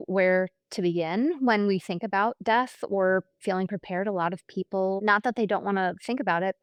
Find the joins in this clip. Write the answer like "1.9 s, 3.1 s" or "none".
none

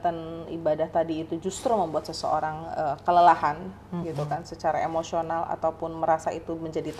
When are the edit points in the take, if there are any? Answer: none

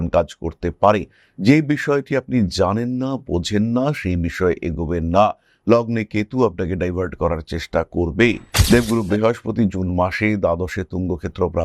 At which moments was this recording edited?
8.5 s

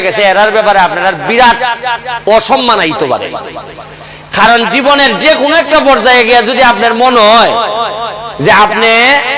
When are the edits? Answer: none

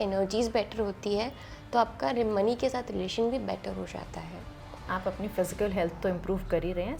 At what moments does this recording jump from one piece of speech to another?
4.8 s

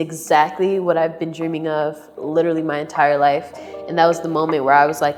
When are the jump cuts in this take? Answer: none

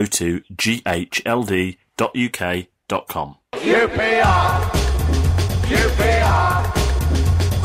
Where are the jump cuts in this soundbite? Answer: 3.4 s

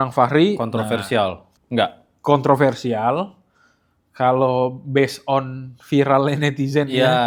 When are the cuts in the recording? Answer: none

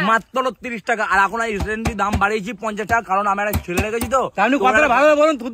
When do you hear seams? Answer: none

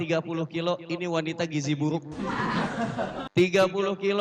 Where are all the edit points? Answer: 3.2 s

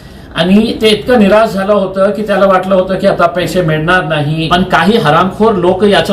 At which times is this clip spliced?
4.4 s

